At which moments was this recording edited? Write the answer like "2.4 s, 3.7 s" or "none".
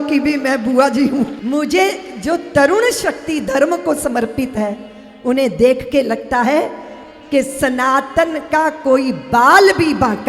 1.4 s